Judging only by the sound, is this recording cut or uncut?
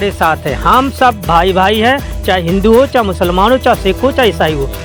uncut